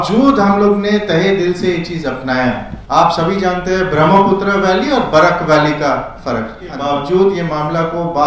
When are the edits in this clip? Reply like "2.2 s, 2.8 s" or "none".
2.7 s, 6.7 s